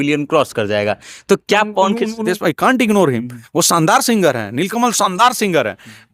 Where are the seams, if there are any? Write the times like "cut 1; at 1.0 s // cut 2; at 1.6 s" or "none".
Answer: cut 1; at 2.2 s